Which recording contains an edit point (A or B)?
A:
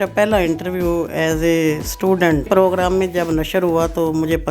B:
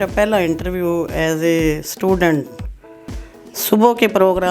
A